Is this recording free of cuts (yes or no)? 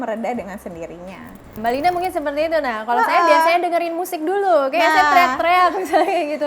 no